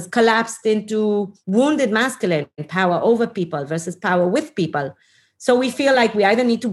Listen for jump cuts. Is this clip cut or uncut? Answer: cut